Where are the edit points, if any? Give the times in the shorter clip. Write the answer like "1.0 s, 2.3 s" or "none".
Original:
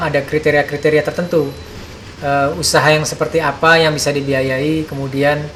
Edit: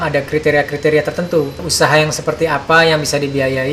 1.7 s